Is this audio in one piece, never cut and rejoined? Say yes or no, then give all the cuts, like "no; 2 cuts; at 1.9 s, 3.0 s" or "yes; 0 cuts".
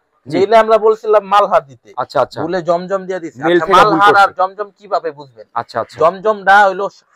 yes; 0 cuts